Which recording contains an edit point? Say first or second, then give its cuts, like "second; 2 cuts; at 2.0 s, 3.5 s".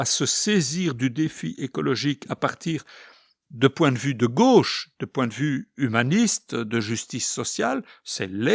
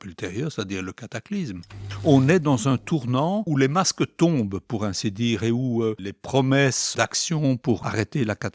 second; 5 cuts; at 1.9 s, 3.5 s, 6.1 s, 6.9 s, 7.8 s